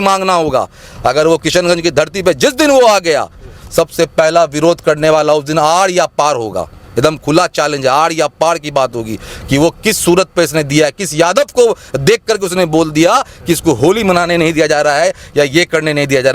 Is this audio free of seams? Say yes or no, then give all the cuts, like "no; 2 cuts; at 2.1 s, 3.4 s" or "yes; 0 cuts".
yes; 0 cuts